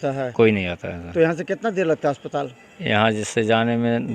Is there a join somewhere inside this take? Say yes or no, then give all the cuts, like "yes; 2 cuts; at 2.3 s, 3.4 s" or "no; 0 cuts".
no; 0 cuts